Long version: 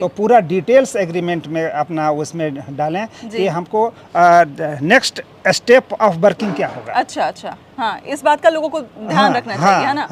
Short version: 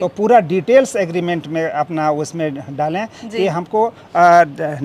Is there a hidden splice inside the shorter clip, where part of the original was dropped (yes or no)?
no